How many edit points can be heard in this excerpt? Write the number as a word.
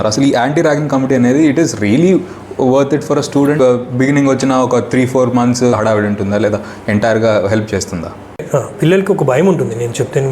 three